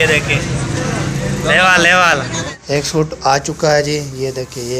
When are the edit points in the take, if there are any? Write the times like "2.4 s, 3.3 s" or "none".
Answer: 2.4 s